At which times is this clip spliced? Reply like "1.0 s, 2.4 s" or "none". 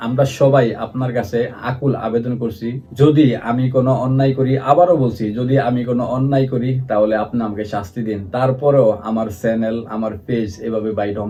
none